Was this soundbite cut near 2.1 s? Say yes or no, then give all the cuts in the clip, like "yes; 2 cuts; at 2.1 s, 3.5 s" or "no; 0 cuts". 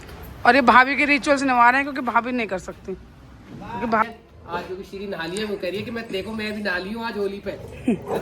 no; 1 cut; at 4.0 s